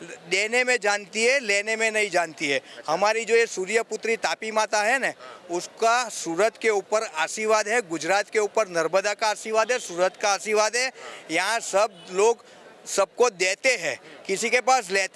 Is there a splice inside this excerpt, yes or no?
no